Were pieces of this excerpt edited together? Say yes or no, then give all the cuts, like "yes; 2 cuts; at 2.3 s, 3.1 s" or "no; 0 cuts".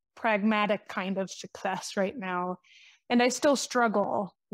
no; 0 cuts